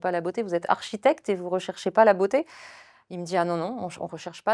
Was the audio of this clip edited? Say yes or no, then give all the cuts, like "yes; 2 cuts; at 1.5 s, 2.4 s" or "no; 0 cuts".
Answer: no; 0 cuts